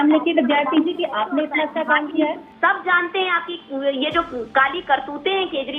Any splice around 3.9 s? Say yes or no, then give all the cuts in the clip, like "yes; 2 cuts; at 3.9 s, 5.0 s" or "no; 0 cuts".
no; 1 cut; at 2.5 s